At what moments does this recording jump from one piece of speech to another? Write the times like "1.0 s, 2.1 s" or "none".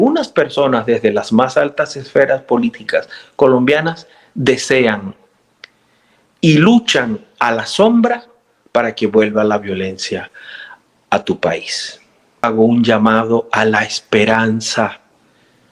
12.4 s